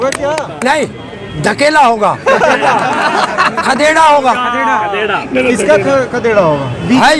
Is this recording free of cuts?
yes; 0 cuts

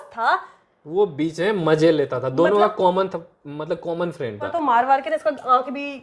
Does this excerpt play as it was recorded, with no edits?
no; 1 cut; at 4.5 s

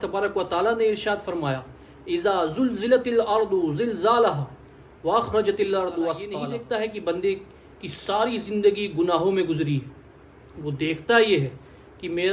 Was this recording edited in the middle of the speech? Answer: yes; 1 cut; at 6.4 s

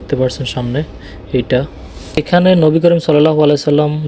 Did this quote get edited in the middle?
yes; 1 cut; at 2.2 s

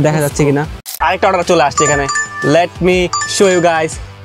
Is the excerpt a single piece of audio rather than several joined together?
no; 1 cut; at 1.0 s

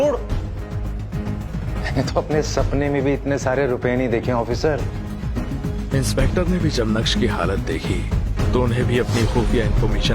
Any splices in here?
yes; 2 cuts; at 1.7 s, 5.1 s

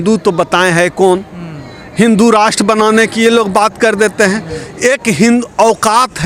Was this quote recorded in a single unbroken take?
yes; 0 cuts

